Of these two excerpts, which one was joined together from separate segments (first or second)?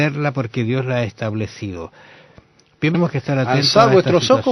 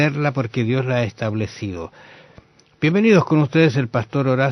second